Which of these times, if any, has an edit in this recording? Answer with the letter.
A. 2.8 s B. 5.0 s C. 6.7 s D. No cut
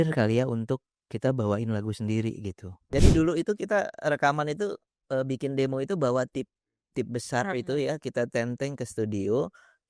A